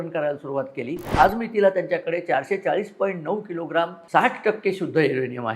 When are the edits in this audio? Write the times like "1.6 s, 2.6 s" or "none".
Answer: 1.0 s, 4.0 s